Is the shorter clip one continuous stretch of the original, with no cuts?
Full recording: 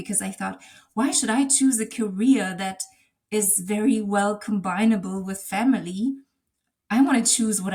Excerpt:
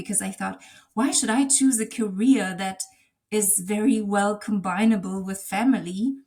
yes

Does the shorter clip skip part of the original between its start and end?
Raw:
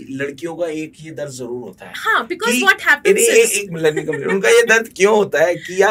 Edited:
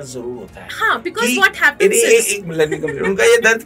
no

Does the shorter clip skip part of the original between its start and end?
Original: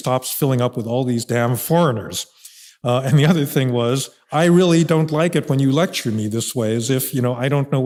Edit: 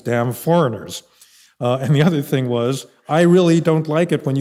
no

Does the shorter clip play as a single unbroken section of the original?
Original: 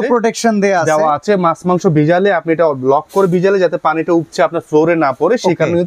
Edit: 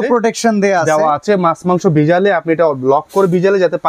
yes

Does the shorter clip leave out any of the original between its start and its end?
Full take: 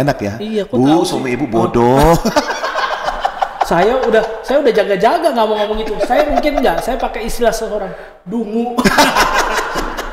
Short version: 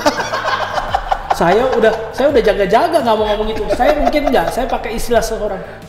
no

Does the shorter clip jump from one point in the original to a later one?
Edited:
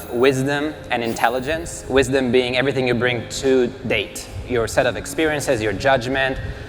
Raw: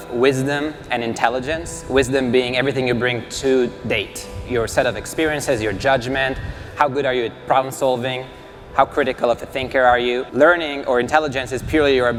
no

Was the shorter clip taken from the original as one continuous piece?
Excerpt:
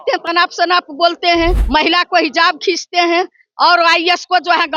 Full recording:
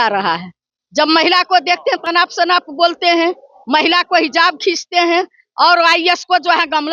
no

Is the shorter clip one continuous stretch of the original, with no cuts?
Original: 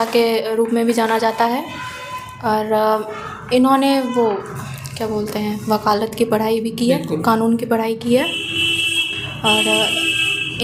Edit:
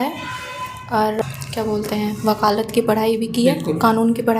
no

